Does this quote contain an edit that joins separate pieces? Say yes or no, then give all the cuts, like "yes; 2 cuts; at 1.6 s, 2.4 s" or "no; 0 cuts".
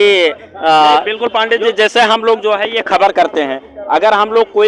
no; 0 cuts